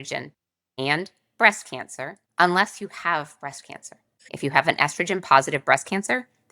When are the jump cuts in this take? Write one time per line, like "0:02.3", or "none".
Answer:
0:04.3

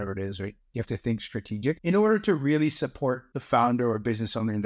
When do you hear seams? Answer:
0:01.8
0:03.3

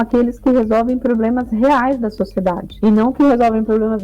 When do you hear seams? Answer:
none

